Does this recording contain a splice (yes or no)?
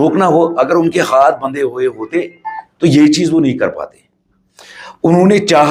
no